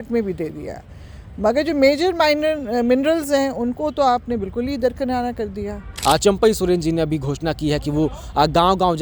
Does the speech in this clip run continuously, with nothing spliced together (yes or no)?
no